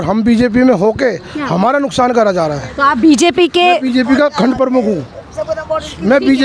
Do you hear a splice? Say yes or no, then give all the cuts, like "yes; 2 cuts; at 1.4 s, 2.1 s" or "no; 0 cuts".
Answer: no; 0 cuts